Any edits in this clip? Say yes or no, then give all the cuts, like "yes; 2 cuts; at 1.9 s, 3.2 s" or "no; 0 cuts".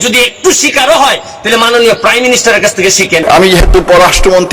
yes; 1 cut; at 3.2 s